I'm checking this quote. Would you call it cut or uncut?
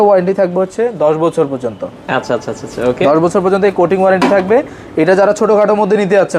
uncut